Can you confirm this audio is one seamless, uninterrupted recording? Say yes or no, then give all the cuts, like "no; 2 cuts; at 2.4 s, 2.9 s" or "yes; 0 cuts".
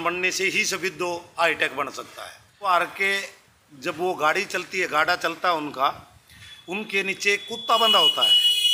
no; 1 cut; at 2.7 s